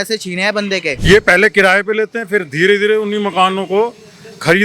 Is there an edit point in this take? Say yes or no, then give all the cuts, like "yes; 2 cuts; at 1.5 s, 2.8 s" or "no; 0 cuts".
yes; 1 cut; at 0.9 s